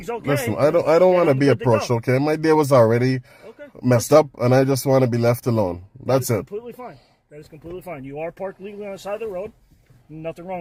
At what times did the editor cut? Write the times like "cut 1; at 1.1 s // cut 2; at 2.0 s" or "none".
none